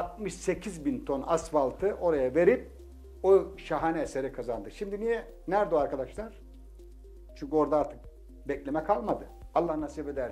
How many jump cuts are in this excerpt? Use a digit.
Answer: 1